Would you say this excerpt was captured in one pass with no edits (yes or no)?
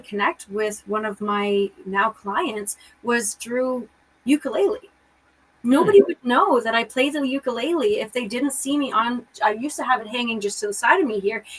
yes